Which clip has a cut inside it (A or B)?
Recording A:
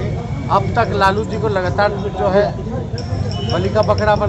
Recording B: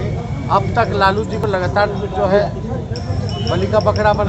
B